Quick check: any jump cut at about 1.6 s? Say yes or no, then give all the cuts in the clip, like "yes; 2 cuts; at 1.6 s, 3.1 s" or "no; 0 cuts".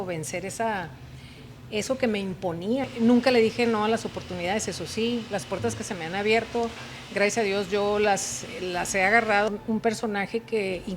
no; 2 cuts; at 2.9 s, 9.5 s